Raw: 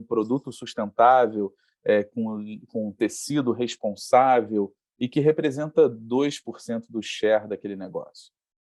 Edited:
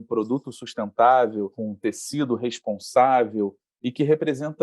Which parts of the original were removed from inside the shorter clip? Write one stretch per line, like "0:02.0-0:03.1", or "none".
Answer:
0:01.6-0:02.7